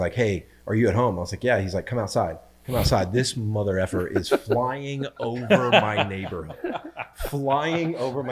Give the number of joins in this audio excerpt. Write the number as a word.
zero